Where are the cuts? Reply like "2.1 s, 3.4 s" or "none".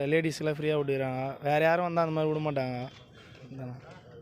none